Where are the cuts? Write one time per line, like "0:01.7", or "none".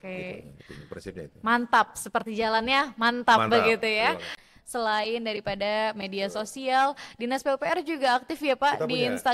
0:04.4